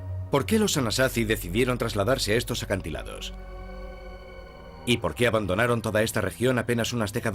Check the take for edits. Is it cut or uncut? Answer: cut